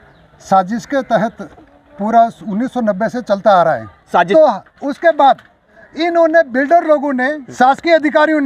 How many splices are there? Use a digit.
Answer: 2